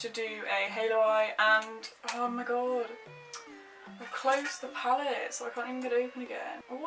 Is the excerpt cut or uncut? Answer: uncut